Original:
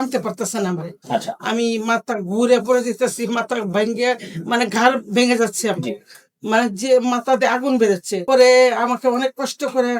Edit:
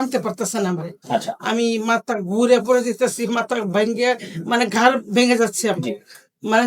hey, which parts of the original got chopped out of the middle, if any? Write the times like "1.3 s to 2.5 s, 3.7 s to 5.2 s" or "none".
none